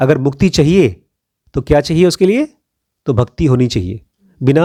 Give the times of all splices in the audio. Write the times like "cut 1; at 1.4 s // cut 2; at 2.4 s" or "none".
none